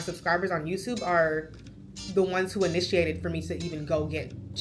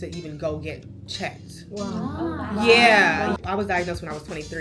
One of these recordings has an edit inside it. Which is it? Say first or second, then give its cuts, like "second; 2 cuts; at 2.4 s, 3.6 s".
second; 1 cut; at 3.4 s